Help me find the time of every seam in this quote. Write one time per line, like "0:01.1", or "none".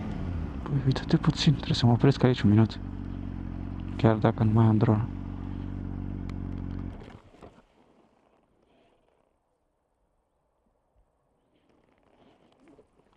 none